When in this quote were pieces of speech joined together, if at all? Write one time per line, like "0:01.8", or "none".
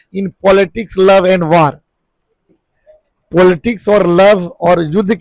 none